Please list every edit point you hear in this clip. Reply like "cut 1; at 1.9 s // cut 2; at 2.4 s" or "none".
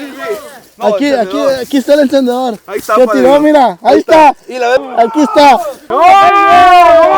cut 1; at 4.8 s // cut 2; at 5.8 s